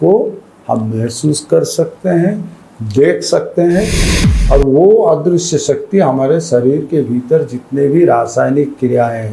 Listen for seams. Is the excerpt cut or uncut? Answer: cut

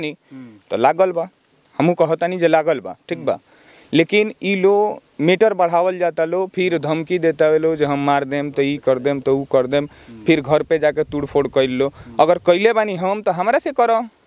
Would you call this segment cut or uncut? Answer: uncut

